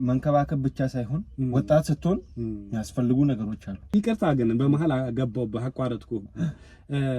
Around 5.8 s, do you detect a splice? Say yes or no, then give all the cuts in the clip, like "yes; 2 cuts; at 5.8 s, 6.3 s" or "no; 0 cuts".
no; 1 cut; at 3.8 s